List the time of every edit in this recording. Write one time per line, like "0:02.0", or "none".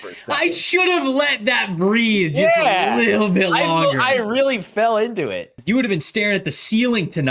0:05.6